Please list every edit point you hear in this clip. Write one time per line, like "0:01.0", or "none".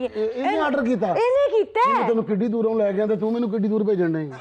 none